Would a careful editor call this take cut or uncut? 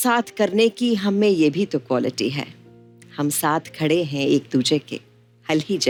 uncut